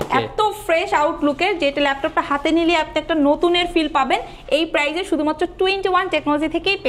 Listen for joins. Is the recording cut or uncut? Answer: uncut